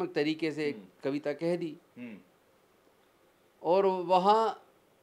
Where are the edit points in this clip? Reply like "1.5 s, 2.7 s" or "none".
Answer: none

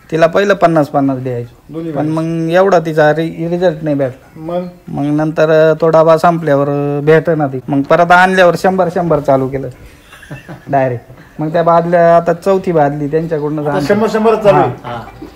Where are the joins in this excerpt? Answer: 7.5 s

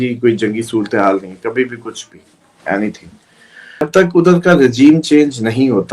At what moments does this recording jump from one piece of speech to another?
3.9 s

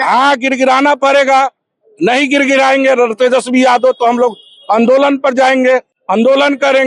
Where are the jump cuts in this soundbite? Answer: none

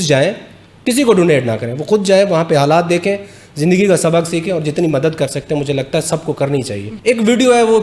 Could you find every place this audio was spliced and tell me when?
6.8 s

